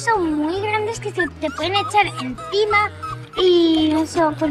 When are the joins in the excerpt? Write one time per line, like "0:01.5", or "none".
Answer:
none